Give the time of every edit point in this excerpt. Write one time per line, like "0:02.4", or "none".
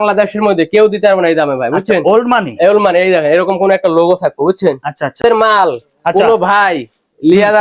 0:05.2